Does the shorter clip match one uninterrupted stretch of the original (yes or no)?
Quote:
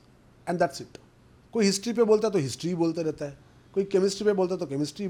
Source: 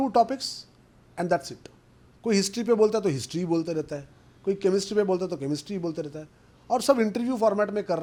yes